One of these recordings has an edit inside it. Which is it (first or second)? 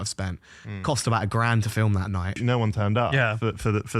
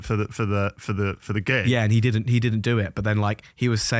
first